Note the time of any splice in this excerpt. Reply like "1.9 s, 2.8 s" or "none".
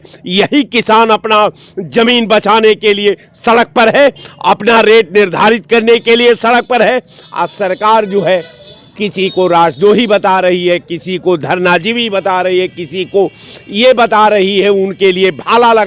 none